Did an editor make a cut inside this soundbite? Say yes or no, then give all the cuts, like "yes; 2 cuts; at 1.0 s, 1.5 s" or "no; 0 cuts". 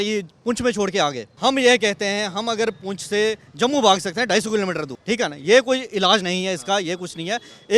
yes; 2 cuts; at 1.3 s, 4.9 s